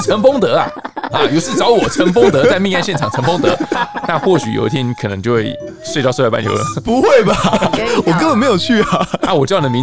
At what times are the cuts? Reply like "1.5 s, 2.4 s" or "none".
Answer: none